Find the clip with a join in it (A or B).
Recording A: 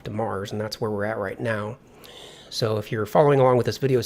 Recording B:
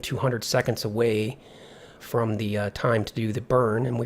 B